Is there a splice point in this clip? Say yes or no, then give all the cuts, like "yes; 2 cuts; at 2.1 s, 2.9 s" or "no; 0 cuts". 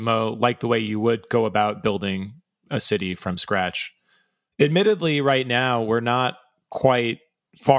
no; 0 cuts